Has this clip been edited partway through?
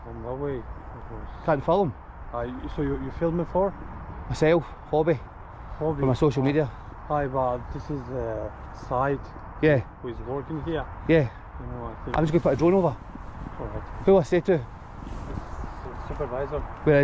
no; 0 cuts

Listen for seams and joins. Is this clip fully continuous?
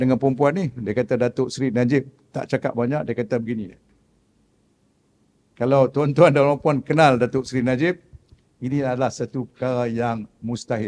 yes; 0 cuts

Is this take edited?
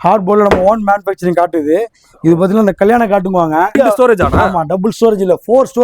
yes; 1 cut; at 3.8 s

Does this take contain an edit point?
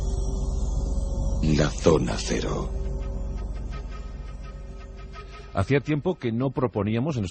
no; 0 cuts

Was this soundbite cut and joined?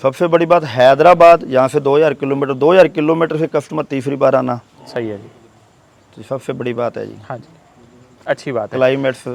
no; 0 cuts

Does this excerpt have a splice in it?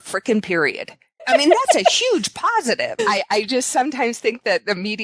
yes; 2 cuts; at 1.2 s, 2.9 s

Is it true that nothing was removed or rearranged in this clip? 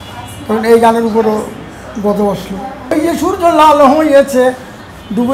no; 1 cut; at 2.9 s

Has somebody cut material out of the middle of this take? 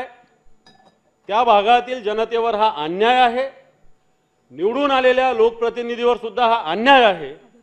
no; 0 cuts

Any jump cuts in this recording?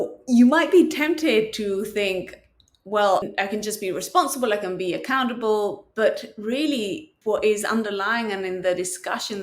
yes; 2 cuts; at 3.3 s, 7.1 s

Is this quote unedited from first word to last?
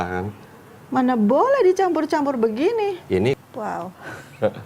no; 1 cut; at 3.4 s

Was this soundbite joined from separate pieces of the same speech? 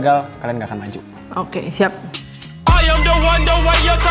no; 0 cuts

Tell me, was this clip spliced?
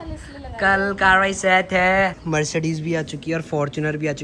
yes; 1 cut; at 2.2 s

